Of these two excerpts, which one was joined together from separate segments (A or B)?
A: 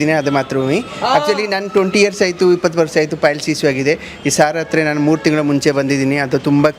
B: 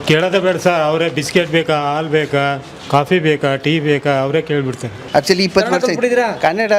B